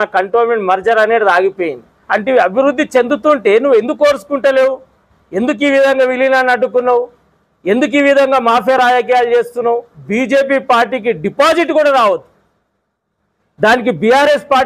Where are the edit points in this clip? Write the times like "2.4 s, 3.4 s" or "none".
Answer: 2.0 s, 10.0 s